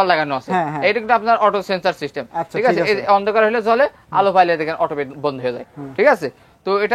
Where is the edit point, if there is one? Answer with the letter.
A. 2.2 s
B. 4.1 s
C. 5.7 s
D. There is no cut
D